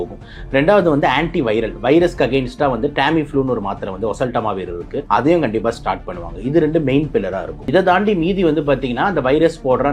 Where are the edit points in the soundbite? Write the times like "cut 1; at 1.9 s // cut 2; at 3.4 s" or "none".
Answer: cut 1; at 5.0 s // cut 2; at 7.5 s